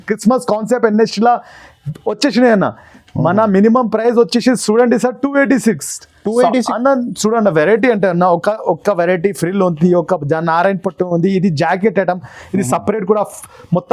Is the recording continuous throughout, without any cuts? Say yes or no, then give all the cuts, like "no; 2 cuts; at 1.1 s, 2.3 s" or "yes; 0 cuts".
no; 1 cut; at 6.7 s